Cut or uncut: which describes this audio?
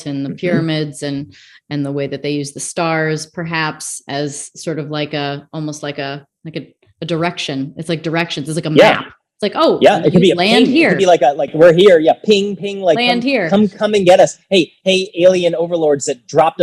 uncut